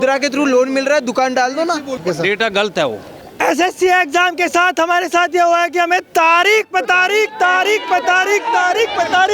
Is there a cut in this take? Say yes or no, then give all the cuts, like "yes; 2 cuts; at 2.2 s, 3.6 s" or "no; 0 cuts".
yes; 2 cuts; at 2.0 s, 3.3 s